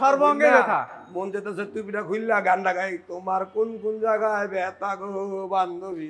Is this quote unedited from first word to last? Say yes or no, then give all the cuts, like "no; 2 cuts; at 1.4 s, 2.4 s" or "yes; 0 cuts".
yes; 0 cuts